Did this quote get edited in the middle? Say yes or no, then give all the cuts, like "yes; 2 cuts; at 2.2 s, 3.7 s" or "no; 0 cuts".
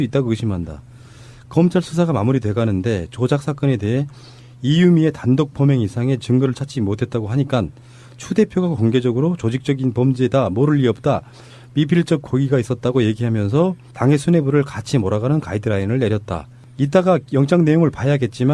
no; 0 cuts